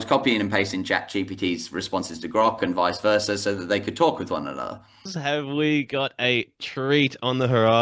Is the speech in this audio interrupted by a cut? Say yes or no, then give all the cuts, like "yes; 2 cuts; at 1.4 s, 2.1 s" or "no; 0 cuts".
yes; 1 cut; at 5.1 s